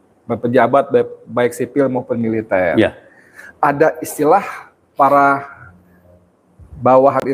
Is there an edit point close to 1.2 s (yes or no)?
no